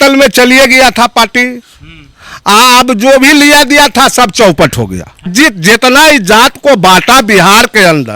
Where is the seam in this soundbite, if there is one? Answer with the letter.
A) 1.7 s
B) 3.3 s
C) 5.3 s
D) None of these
C